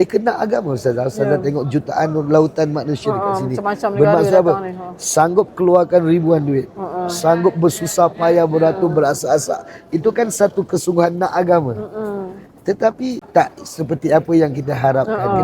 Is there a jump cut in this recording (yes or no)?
yes